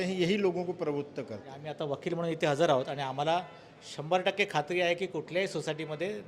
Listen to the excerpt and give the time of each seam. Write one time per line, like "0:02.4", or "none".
0:01.6